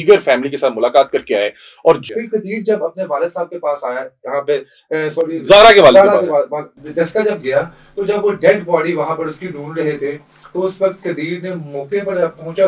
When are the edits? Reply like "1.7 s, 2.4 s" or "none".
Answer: 2.0 s